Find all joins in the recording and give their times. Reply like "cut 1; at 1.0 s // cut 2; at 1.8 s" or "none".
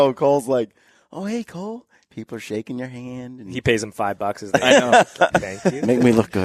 none